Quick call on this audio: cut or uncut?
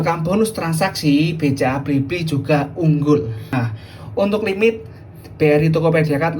cut